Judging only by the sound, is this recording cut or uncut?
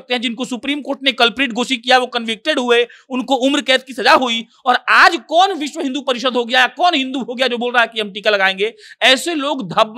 uncut